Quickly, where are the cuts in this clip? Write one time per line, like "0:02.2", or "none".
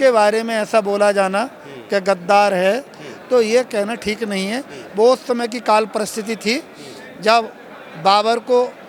none